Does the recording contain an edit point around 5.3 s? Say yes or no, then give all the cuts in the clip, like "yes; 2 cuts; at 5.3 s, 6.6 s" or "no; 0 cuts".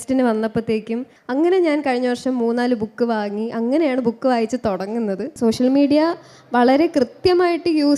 yes; 2 cuts; at 1.1 s, 5.3 s